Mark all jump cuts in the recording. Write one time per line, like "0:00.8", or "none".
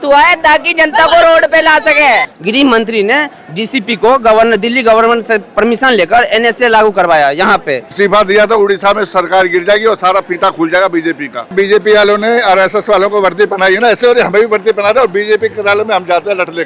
0:02.4
0:07.9
0:11.5